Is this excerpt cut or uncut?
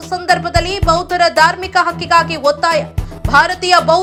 uncut